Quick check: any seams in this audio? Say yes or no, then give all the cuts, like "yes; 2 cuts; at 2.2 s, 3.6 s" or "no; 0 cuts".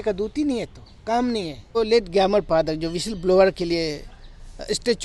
yes; 1 cut; at 1.8 s